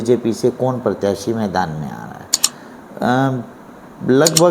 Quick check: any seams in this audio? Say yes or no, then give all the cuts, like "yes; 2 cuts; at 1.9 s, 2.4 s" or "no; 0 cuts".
no; 0 cuts